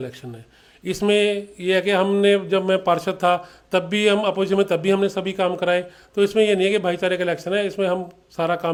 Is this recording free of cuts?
yes; 0 cuts

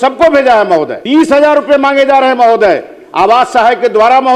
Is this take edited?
yes; 1 cut; at 1.0 s

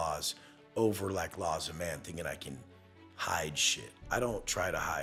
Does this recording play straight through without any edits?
yes; 0 cuts

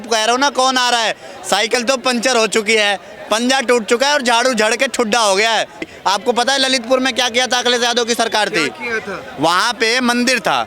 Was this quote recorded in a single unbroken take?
no; 1 cut; at 5.9 s

